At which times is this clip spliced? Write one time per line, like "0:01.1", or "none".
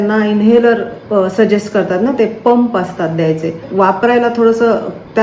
0:03.6